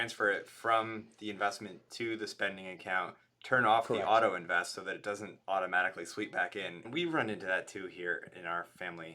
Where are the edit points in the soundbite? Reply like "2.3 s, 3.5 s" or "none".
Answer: 6.8 s